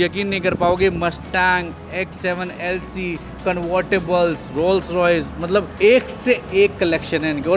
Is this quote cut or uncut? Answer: cut